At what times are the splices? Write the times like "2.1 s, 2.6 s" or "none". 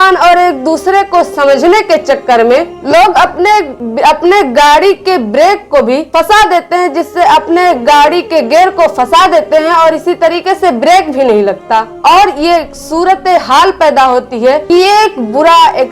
3.8 s, 6.1 s, 14.6 s